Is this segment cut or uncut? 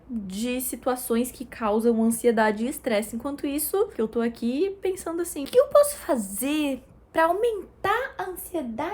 cut